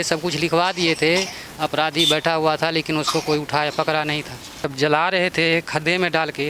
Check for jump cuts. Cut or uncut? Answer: cut